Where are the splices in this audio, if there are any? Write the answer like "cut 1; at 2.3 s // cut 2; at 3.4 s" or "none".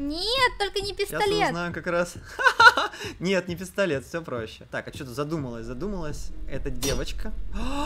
none